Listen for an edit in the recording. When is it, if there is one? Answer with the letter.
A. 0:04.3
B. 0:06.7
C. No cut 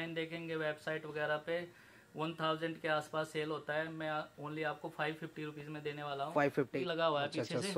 B